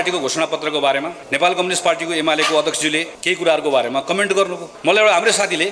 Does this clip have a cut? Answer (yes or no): yes